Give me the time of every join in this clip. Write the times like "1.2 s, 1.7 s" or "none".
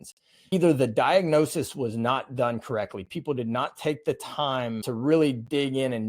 4.8 s